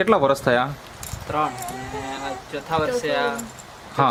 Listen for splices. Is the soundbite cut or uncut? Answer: uncut